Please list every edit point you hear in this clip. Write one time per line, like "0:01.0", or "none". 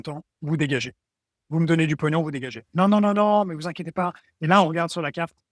none